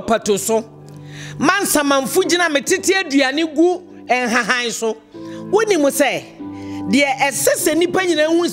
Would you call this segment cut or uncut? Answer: uncut